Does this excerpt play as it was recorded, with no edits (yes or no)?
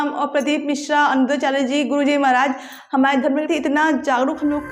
no